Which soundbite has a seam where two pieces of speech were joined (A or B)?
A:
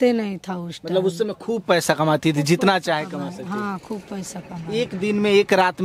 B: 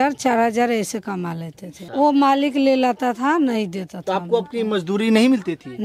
B